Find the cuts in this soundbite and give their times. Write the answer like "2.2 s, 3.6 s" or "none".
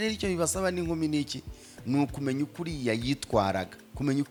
none

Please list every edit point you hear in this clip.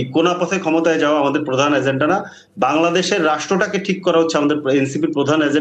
none

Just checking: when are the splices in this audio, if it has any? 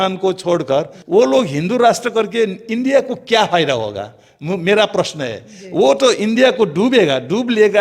none

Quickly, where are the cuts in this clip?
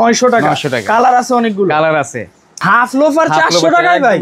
2.4 s

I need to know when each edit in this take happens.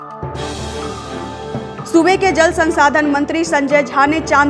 1.7 s

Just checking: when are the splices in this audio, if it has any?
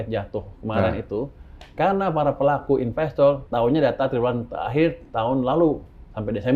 3.4 s

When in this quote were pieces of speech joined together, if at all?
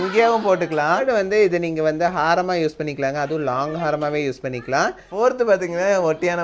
1.0 s, 5.0 s

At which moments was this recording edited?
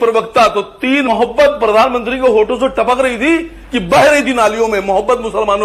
1.1 s

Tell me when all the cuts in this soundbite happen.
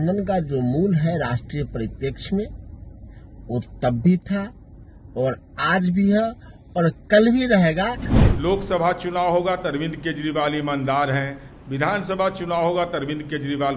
8.1 s

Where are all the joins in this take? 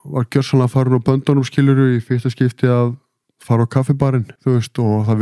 4.3 s

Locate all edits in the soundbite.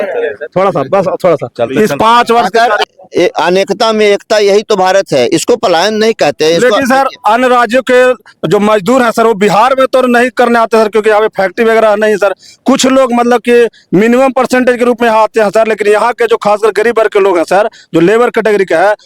2.8 s

